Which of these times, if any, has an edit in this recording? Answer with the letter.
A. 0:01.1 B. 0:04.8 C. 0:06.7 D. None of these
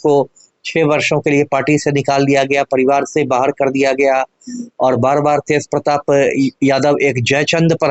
D